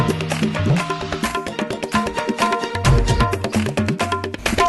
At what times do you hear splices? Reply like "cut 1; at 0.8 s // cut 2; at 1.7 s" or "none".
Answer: cut 1; at 1.3 s